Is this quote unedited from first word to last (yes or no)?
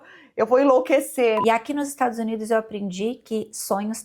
no